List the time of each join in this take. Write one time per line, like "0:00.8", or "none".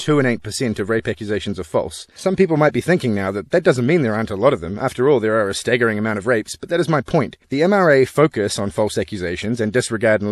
0:02.0